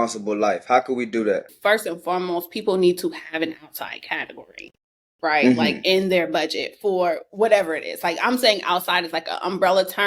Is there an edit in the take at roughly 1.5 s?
yes; 1 cut; at 1.5 s

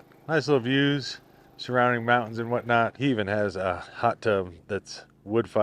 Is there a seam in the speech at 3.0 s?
yes; 1 cut; at 3.0 s

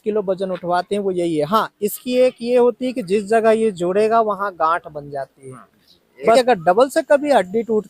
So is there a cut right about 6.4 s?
yes; 1 cut; at 6.4 s

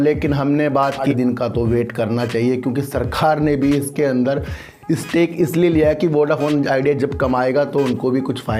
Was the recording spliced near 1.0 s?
yes; 1 cut; at 1.0 s

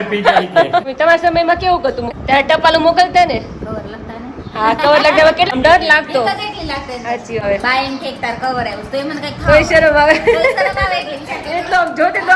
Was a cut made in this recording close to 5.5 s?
yes; 4 cuts; at 0.9 s, 2.1 s, 5.5 s, 7.4 s

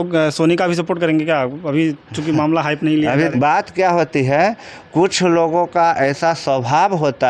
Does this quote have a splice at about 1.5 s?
no; 1 cut; at 3.3 s

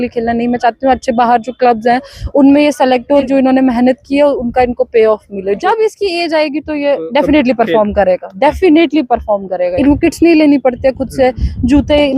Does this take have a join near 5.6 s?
yes; 3 cuts; at 3.2 s, 5.6 s, 9.7 s

